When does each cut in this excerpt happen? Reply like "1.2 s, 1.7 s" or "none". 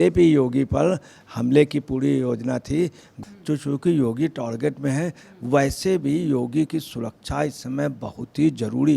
3.1 s

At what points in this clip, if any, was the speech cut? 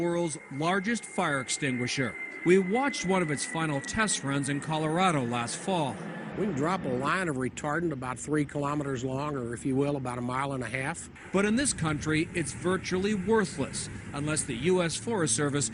1.5 s

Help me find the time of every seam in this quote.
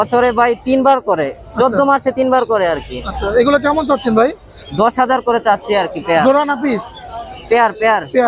none

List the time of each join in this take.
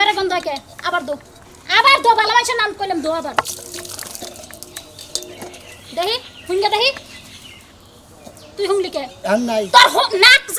3.5 s

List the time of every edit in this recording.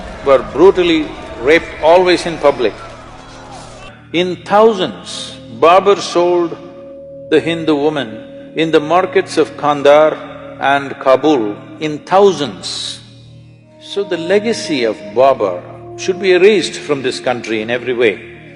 3.8 s, 13.8 s

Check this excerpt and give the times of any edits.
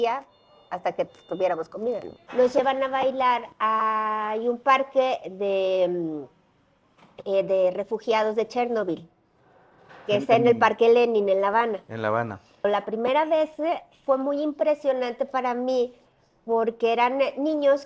2.1 s, 12.7 s

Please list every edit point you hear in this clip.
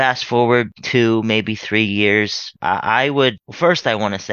2.5 s, 3.5 s

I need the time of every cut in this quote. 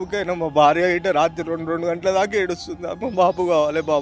2.9 s

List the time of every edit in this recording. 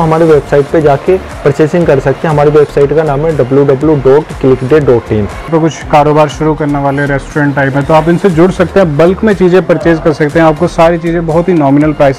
5.5 s

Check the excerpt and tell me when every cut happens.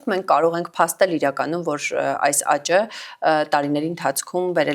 none

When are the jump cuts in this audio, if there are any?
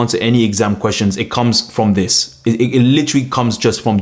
none

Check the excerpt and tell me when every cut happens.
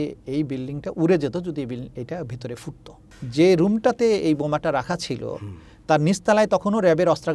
3.2 s

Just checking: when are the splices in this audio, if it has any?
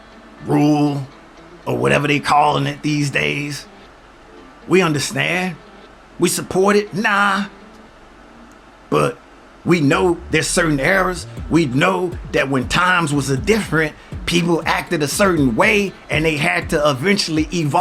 none

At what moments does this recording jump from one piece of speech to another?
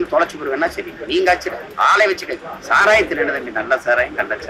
1.6 s, 2.5 s

